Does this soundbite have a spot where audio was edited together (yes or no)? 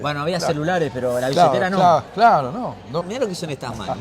yes